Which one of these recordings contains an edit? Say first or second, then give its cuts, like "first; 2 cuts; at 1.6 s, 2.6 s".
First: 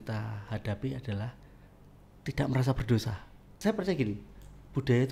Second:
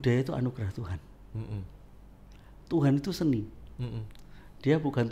first; 1 cut; at 3.4 s